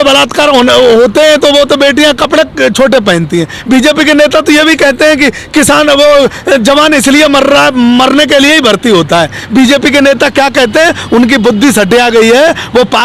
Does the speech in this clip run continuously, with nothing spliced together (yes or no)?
yes